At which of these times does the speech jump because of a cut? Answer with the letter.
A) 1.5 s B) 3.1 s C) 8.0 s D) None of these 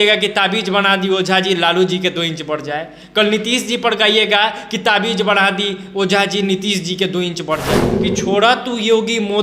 C